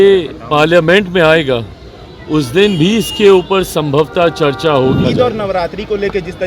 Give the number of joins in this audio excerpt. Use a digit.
1